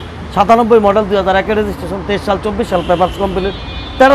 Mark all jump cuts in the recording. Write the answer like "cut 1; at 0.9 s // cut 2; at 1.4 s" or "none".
none